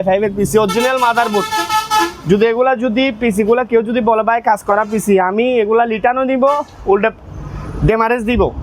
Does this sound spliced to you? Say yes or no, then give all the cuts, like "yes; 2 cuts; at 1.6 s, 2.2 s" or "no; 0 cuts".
no; 0 cuts